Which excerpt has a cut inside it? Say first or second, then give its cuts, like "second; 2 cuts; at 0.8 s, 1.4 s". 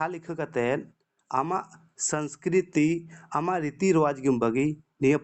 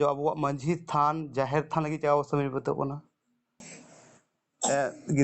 second; 1 cut; at 3.6 s